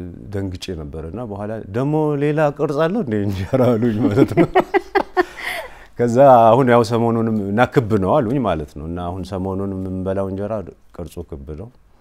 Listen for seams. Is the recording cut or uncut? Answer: uncut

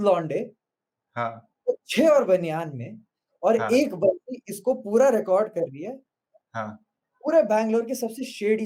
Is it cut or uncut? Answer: uncut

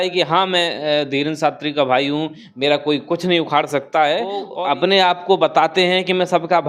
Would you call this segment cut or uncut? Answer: cut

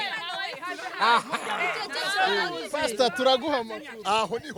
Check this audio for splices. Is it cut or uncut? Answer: uncut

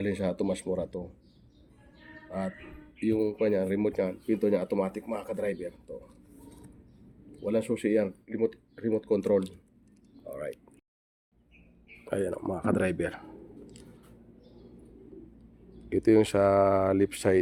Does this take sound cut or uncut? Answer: uncut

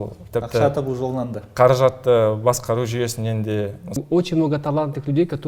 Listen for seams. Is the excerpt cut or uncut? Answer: cut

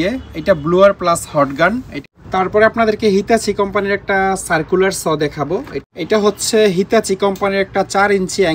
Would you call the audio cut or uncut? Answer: cut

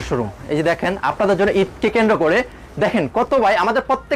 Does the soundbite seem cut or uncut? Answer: uncut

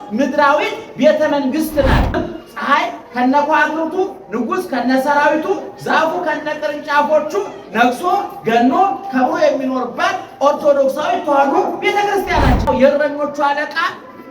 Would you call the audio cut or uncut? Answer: cut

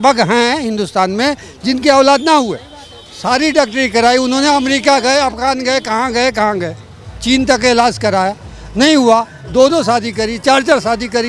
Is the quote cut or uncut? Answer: uncut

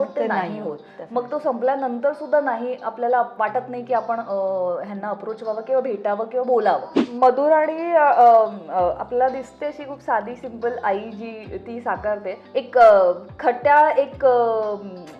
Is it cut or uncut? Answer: cut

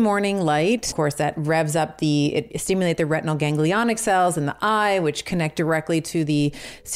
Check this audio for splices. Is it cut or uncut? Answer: cut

